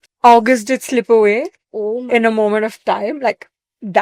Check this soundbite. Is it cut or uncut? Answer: uncut